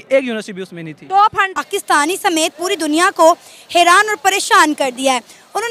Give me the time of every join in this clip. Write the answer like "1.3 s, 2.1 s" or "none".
1.6 s